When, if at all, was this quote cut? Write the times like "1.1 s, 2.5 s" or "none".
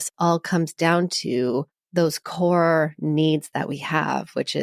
1.8 s